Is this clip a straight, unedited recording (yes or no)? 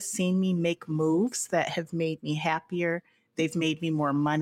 yes